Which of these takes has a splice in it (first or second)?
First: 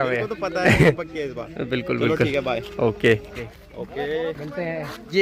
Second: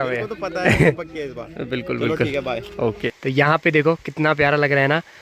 second